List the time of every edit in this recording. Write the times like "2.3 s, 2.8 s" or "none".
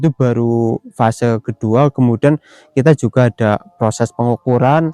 none